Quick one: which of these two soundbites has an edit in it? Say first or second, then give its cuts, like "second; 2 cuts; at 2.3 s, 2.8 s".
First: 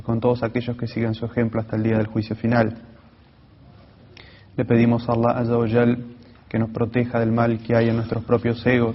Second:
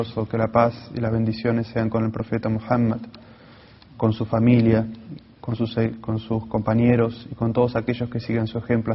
first; 1 cut; at 6.1 s